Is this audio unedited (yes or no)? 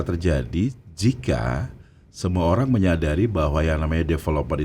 yes